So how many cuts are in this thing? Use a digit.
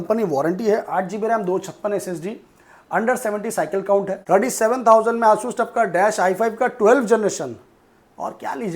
1